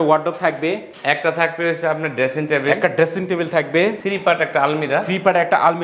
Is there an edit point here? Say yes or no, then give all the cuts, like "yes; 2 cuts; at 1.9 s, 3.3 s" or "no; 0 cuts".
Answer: yes; 2 cuts; at 0.9 s, 4.0 s